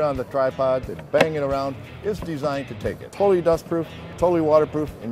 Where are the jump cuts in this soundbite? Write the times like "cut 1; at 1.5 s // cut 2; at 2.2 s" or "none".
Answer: cut 1; at 3.1 s // cut 2; at 4.0 s